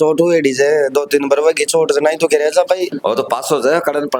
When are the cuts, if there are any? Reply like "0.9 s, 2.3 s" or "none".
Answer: 2.9 s